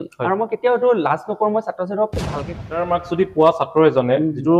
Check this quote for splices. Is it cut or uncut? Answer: cut